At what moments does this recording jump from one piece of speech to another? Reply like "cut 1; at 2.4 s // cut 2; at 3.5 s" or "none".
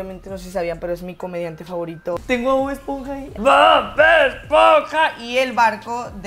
cut 1; at 2.2 s // cut 2; at 3.3 s